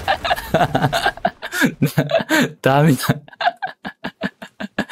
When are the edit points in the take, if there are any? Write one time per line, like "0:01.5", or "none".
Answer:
none